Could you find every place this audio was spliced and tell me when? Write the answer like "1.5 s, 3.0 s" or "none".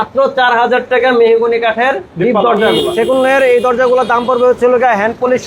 2.8 s